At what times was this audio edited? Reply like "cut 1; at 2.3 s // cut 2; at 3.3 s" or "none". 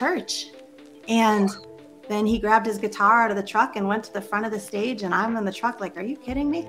none